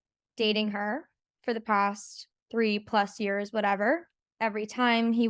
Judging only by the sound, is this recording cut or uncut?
cut